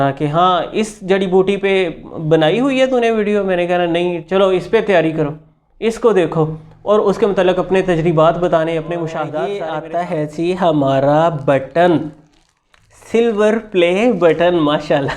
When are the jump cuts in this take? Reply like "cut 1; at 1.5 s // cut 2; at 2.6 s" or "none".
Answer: cut 1; at 9.5 s